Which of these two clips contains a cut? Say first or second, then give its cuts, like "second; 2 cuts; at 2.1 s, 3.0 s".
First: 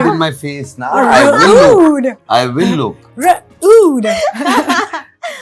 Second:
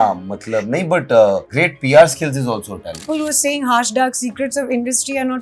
second; 2 cuts; at 1.5 s, 3.0 s